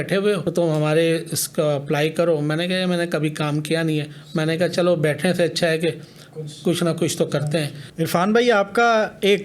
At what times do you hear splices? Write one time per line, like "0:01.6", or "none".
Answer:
0:07.8